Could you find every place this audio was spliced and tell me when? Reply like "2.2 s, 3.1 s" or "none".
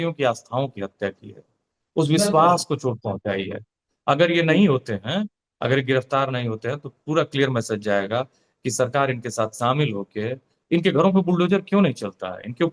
none